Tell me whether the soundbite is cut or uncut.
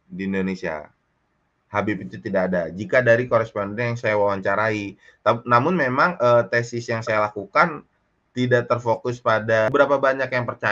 cut